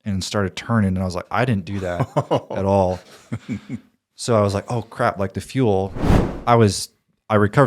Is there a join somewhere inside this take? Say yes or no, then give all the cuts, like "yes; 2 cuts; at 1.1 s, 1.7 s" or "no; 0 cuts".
yes; 1 cut; at 6.0 s